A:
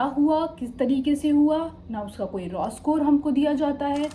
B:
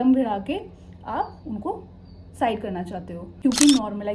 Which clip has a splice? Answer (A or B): B